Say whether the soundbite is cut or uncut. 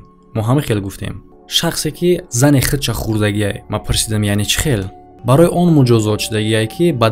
cut